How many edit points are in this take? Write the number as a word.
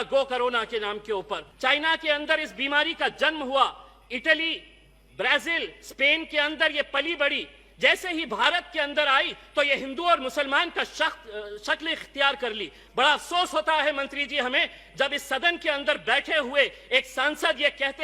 one